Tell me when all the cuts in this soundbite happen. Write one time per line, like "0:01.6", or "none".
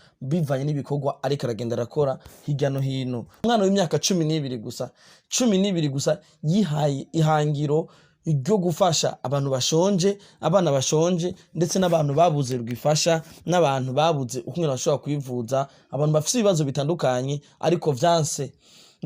0:03.4

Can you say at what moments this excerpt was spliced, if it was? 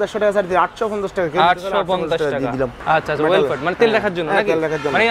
0:02.8

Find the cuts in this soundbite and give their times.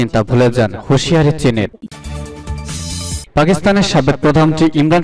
0:01.7
0:03.2

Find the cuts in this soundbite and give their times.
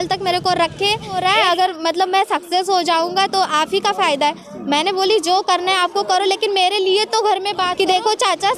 0:01.2
0:07.7

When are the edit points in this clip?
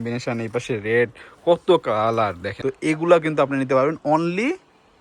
0:02.5

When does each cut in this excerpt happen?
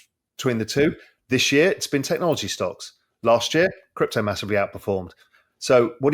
0:01.1

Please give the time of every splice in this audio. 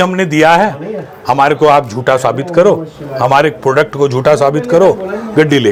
none

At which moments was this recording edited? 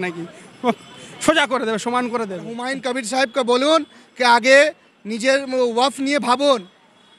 0:02.7

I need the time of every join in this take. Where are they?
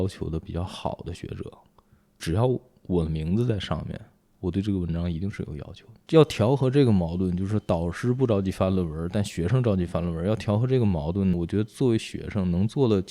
0:05.9

